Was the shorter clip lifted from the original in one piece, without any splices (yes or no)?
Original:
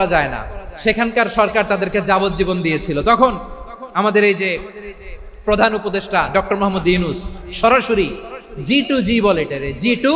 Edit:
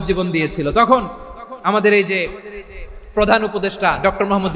yes